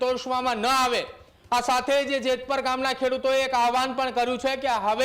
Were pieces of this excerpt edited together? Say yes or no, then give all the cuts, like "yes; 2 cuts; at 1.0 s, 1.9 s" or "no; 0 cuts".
no; 0 cuts